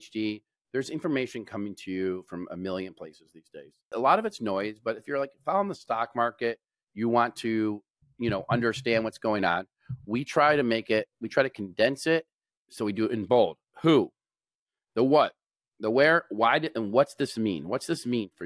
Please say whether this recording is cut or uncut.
cut